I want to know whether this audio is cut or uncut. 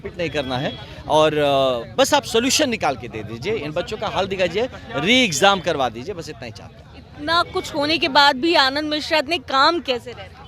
uncut